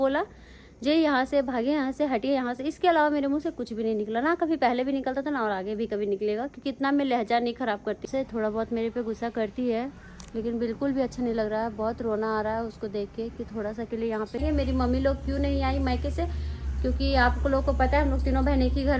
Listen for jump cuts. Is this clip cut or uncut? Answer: cut